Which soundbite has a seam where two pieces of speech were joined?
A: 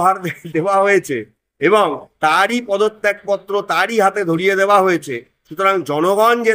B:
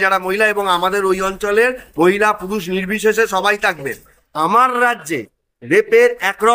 B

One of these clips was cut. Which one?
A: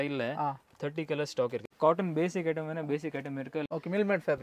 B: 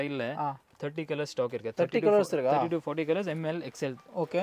A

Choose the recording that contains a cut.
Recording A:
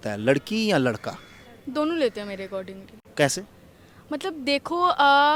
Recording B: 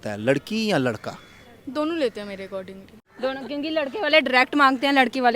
B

